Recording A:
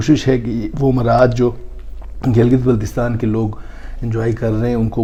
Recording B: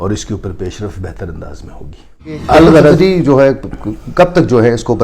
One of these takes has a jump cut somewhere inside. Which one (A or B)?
B